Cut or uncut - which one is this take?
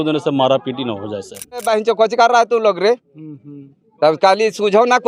cut